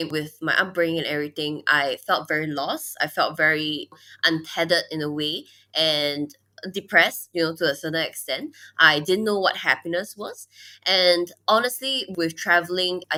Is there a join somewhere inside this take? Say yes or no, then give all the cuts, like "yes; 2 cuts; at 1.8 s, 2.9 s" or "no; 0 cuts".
no; 0 cuts